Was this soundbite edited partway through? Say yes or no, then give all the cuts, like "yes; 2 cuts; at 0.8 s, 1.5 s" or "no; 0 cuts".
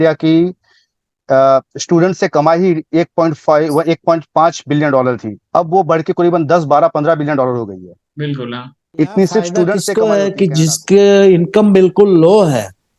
yes; 1 cut; at 9.9 s